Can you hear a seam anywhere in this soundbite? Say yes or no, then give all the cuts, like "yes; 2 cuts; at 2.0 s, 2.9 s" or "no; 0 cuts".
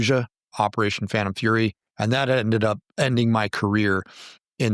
yes; 2 cuts; at 1.8 s, 2.9 s